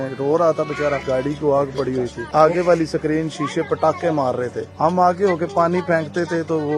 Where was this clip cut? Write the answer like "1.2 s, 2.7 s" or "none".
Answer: 1.0 s, 2.2 s, 4.6 s